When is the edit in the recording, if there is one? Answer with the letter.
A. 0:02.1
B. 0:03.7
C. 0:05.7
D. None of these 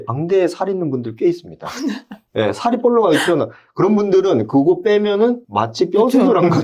D